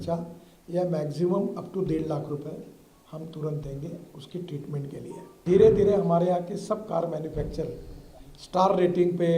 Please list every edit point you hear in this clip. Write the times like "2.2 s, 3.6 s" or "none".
5.4 s